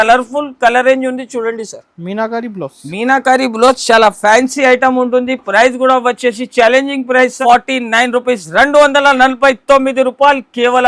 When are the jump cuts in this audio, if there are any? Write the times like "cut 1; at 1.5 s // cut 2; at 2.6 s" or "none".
cut 1; at 7.4 s